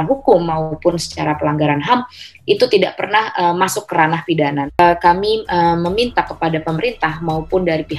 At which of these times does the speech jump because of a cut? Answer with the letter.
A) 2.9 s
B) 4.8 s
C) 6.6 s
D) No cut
B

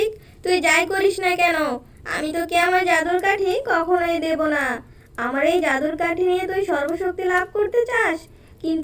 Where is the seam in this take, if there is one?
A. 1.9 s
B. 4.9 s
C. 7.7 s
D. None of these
D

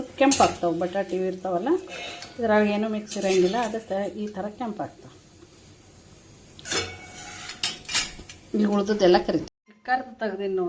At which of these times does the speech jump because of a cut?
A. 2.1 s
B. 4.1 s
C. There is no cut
C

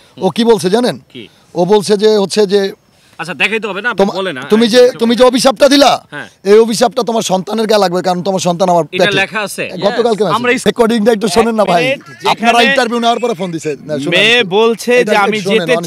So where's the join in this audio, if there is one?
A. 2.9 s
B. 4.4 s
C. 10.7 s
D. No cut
C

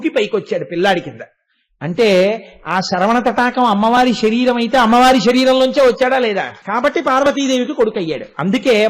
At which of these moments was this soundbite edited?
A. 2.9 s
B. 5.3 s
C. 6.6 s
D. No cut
C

